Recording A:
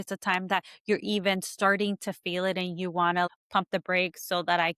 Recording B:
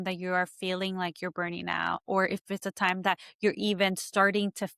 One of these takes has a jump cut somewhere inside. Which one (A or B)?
A